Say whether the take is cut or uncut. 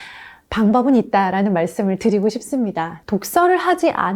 cut